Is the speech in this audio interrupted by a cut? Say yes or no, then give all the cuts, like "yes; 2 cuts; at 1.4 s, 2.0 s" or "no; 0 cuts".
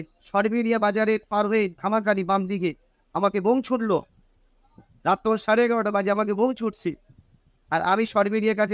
no; 0 cuts